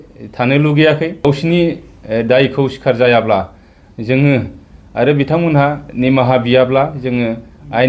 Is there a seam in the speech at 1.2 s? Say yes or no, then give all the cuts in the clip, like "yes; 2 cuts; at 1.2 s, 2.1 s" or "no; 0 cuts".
yes; 1 cut; at 1.2 s